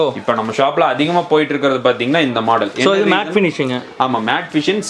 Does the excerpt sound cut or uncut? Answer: uncut